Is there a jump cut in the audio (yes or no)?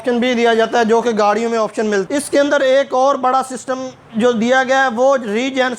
yes